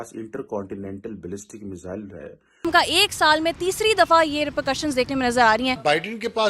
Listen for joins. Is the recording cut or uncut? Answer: cut